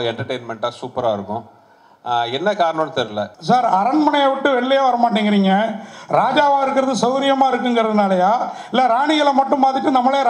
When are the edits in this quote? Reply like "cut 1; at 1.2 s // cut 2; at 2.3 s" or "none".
cut 1; at 3.4 s